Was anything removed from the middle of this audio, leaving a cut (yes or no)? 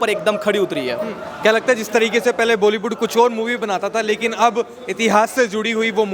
no